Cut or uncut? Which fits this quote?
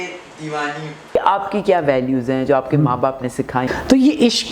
cut